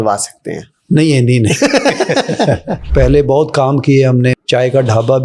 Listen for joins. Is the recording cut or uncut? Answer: cut